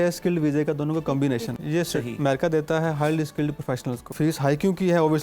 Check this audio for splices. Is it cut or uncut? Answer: cut